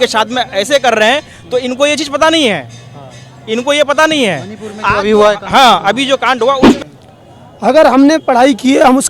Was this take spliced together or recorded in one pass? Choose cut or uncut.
cut